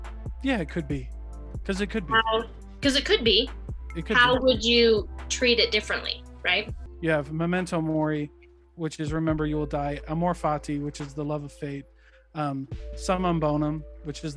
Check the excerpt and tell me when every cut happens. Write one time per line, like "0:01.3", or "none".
0:06.8